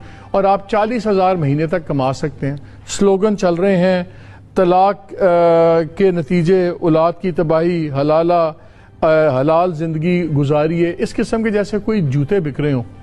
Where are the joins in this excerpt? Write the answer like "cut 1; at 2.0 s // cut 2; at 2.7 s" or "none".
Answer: none